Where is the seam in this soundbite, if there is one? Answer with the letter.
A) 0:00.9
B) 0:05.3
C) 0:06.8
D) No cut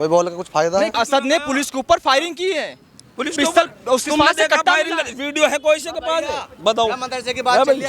A